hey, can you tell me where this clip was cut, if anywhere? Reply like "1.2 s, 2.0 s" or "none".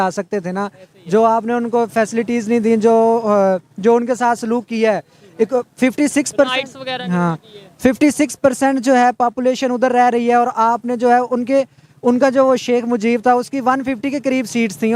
none